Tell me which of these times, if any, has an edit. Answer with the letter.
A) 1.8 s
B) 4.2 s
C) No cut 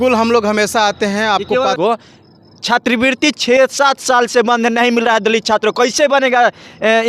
A